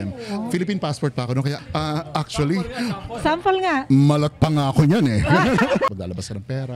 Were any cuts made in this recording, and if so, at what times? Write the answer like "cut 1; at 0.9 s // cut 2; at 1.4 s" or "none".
cut 1; at 1.6 s // cut 2; at 5.9 s